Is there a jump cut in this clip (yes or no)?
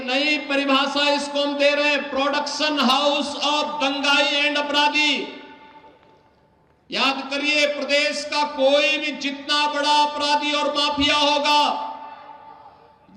no